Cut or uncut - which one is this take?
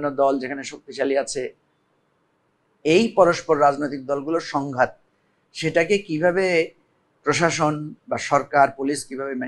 uncut